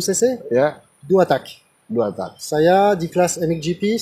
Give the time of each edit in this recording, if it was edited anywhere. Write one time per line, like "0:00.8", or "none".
none